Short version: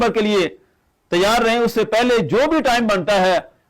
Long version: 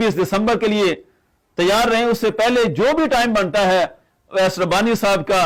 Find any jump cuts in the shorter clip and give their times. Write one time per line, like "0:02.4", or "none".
none